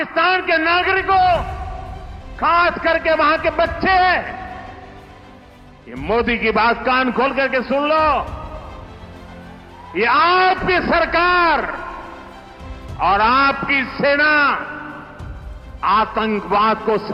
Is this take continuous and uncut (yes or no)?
yes